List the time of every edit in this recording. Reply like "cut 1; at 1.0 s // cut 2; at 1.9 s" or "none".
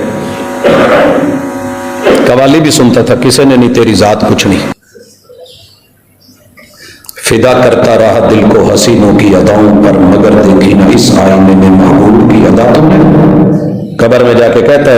cut 1; at 4.7 s